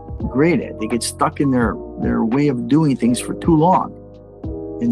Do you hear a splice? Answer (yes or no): no